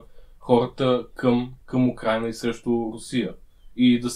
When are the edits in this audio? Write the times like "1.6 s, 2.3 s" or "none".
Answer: 1.6 s